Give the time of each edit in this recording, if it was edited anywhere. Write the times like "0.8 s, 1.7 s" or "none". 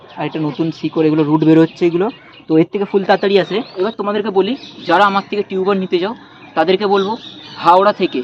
3.9 s